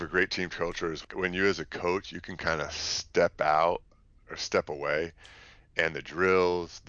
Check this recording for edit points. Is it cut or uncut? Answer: cut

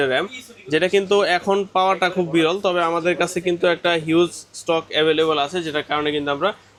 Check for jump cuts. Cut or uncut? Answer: uncut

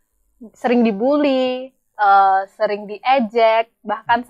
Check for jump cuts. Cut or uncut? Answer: uncut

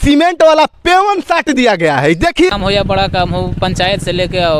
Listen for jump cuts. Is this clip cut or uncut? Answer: cut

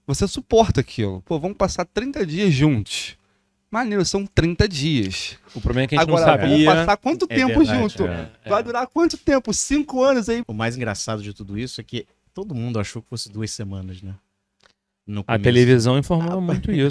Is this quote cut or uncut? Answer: cut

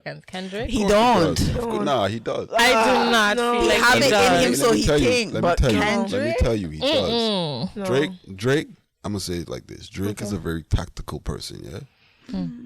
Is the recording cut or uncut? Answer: uncut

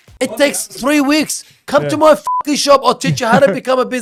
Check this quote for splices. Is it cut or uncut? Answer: uncut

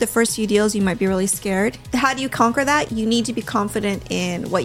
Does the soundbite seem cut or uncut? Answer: cut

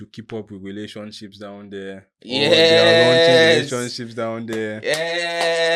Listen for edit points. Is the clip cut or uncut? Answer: uncut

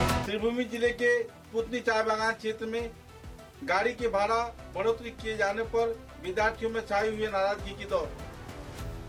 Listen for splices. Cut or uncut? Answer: uncut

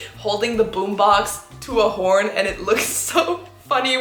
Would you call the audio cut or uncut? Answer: uncut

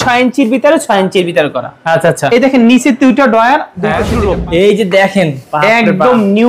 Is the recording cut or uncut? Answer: cut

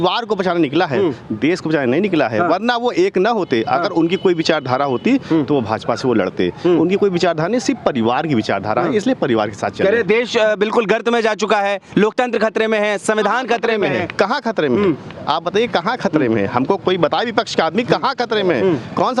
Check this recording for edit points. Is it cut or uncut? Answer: uncut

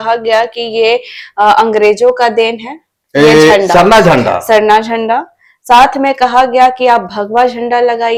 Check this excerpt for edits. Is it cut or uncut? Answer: uncut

